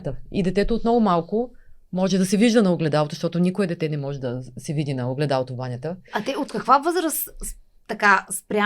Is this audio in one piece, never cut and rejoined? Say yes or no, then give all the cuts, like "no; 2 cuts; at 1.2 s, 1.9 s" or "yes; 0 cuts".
yes; 0 cuts